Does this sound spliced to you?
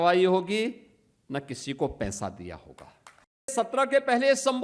yes; 1 cut; at 3.5 s

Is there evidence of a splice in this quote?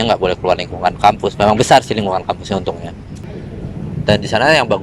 yes; 1 cut; at 3.2 s

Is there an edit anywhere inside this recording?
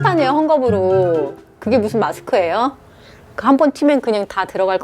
no; 0 cuts

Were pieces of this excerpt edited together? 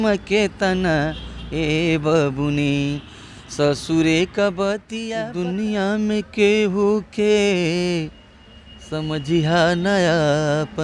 yes; 1 cut; at 5.0 s

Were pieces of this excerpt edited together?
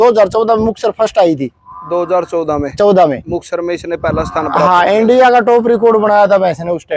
no; 0 cuts

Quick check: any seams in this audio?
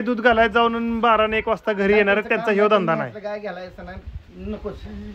no; 0 cuts

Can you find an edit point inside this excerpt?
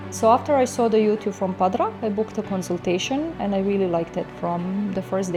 no; 0 cuts

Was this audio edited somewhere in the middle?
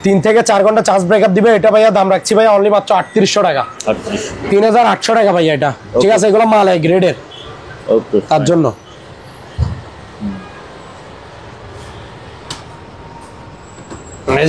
no; 0 cuts

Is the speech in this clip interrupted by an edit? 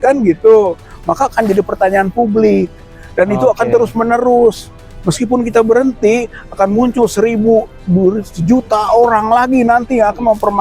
no; 0 cuts

